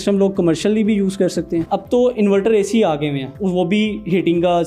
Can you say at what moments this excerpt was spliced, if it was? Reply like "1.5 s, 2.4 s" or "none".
1.6 s, 3.3 s